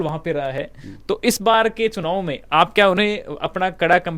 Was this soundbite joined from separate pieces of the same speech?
no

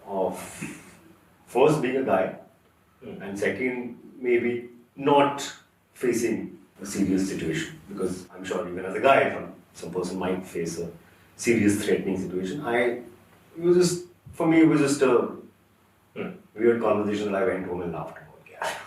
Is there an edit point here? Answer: no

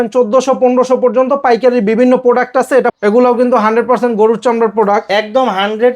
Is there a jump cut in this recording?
yes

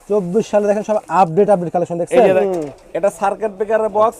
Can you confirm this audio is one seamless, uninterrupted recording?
no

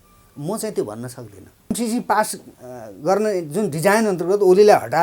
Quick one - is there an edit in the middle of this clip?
yes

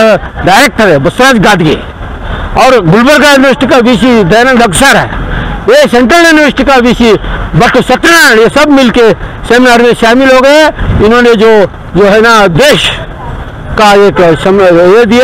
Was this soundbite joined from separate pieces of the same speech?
no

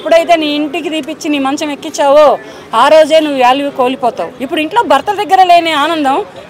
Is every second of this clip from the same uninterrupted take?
no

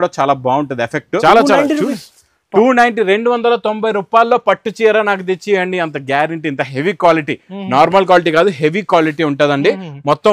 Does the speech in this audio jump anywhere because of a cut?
yes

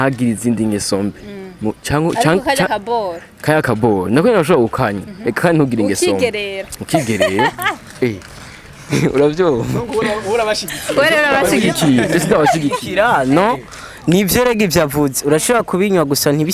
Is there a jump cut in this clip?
no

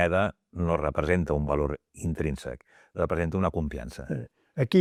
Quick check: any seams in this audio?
no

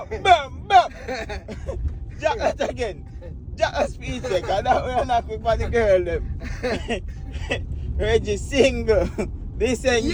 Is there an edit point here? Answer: no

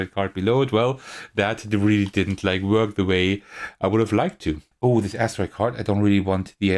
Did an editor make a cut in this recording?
yes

